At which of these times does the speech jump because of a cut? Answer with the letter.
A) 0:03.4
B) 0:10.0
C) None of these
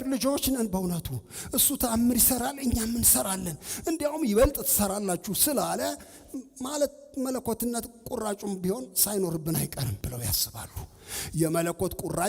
B